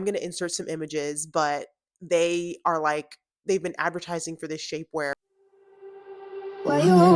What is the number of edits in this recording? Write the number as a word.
one